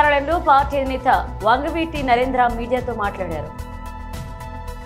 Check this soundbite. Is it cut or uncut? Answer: cut